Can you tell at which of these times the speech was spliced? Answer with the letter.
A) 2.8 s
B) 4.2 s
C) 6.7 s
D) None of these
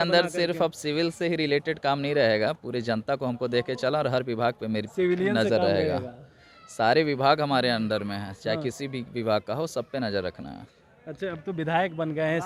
D